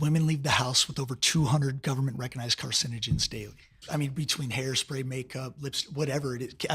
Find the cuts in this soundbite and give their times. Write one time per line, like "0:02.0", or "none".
0:03.9